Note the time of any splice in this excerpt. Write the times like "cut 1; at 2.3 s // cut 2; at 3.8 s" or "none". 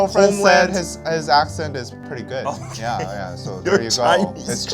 cut 1; at 2.0 s